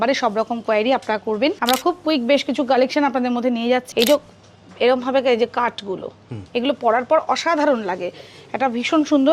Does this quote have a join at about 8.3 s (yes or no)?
no